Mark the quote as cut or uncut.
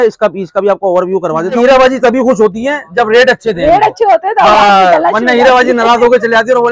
cut